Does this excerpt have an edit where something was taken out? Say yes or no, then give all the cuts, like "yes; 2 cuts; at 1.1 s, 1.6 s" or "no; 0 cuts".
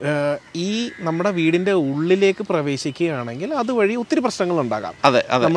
no; 0 cuts